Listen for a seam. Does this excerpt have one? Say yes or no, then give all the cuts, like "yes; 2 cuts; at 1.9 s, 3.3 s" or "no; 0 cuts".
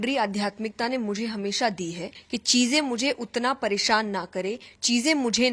yes; 1 cut; at 2.1 s